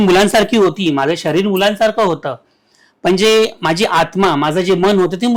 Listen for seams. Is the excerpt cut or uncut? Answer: uncut